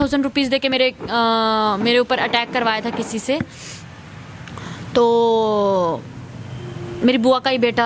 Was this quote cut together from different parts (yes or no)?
no